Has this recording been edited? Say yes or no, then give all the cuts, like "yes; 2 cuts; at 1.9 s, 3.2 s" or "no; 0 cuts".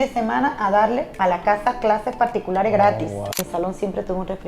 yes; 2 cuts; at 1.1 s, 3.4 s